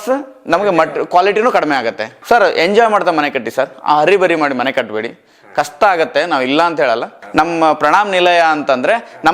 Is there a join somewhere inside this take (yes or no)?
yes